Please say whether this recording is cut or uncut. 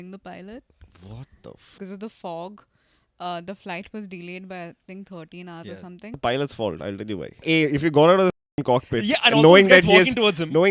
cut